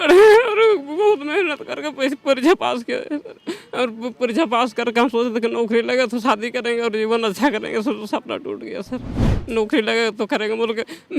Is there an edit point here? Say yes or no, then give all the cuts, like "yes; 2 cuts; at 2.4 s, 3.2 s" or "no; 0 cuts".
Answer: yes; 1 cut; at 9.3 s